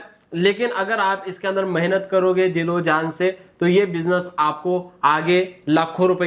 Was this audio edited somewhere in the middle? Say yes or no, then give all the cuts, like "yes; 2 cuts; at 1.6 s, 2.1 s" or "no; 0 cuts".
no; 0 cuts